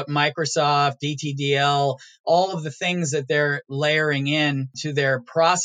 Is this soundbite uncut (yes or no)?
no